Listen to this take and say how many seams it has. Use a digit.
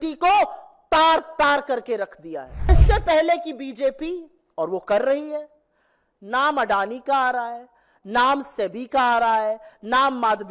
1